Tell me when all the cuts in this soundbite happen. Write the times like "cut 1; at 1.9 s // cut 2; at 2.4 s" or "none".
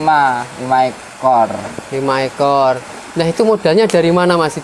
none